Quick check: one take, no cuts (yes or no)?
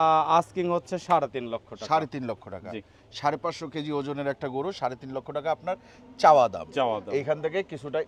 yes